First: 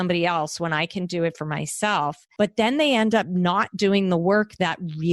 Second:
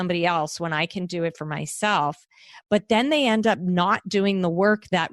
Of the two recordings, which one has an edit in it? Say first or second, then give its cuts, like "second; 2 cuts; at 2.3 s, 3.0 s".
first; 1 cut; at 2.2 s